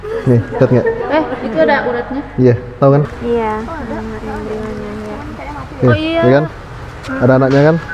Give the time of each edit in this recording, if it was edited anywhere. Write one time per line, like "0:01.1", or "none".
0:03.1